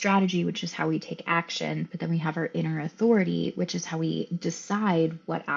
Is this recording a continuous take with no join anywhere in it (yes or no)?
yes